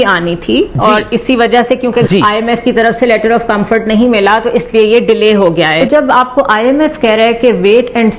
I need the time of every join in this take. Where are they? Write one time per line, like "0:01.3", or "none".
0:02.1
0:05.8